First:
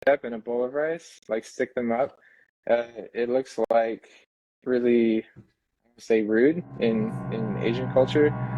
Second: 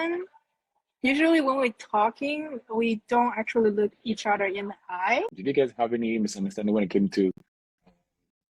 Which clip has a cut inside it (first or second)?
second